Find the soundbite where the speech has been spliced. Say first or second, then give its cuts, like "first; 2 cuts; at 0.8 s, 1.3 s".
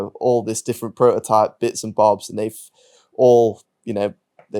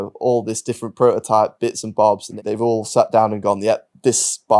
second; 1 cut; at 2.3 s